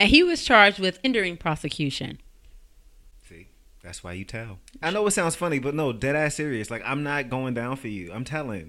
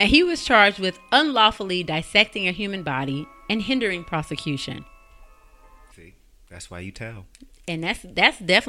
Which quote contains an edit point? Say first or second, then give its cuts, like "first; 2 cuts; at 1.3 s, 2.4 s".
first; 2 cuts; at 1.0 s, 4.8 s